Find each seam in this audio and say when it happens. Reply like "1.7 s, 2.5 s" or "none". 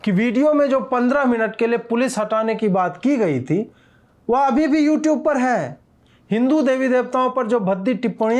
none

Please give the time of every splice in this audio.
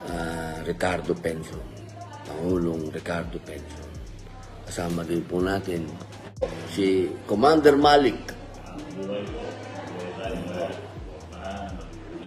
6.4 s

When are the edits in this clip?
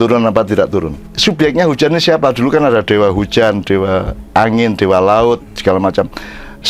1.1 s

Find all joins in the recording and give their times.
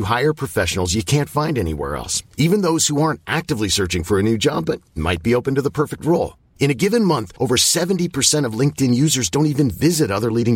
none

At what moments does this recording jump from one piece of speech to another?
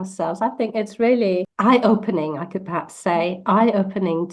1.5 s

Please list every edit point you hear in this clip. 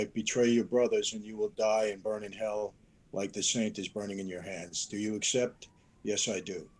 none

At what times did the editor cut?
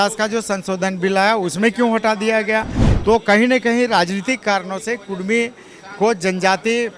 none

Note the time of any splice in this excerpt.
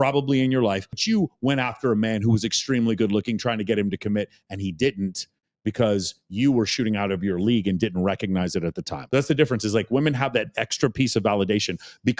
1.0 s, 9.0 s

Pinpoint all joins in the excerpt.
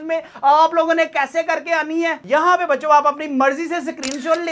2.2 s

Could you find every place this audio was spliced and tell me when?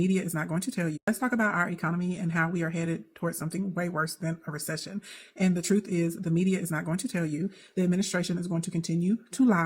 1.0 s

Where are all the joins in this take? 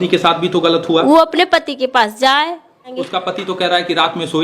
3.0 s

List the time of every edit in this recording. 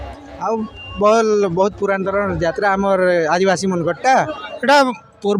4.4 s

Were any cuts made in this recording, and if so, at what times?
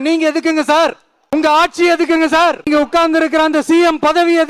1.1 s, 2.7 s

